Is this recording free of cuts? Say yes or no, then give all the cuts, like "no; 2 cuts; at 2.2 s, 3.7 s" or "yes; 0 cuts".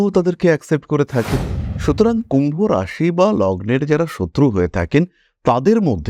yes; 0 cuts